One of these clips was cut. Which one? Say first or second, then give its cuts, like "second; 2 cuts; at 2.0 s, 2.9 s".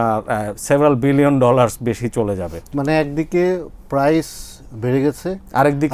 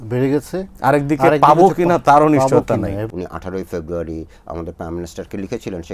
second; 1 cut; at 3.0 s